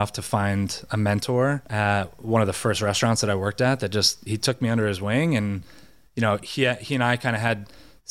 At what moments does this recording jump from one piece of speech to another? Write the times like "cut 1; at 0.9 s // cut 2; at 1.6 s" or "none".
none